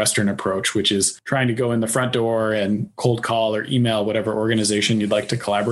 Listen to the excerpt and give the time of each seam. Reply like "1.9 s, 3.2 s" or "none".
1.2 s, 2.9 s